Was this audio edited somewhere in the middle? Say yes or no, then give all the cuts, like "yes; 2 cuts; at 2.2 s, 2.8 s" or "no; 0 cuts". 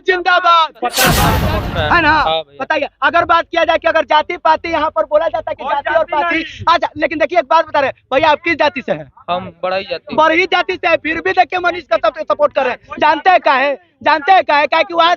yes; 1 cut; at 1.4 s